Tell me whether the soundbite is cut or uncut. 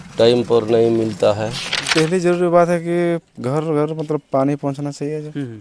cut